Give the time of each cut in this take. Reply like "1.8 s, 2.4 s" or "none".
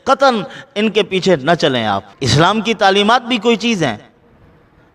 2.1 s